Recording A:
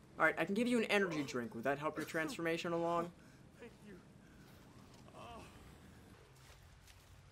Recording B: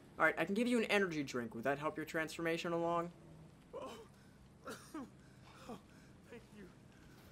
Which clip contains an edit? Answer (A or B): A